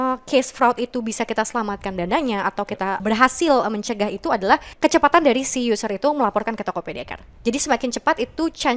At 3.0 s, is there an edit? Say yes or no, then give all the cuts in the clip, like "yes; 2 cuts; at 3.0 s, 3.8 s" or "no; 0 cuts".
yes; 2 cuts; at 3.0 s, 4.7 s